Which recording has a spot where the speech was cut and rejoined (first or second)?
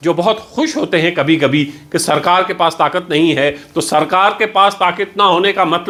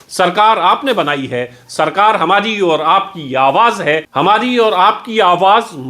second